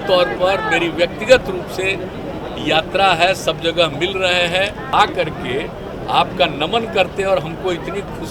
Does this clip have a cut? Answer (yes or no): yes